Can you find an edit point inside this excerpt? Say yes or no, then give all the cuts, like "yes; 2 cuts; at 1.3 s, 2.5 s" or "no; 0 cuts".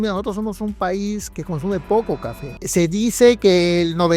yes; 2 cuts; at 1.3 s, 2.6 s